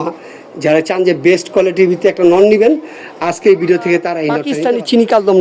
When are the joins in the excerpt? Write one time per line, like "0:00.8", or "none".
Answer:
0:04.4